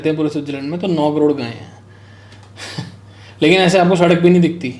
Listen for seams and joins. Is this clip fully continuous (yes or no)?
yes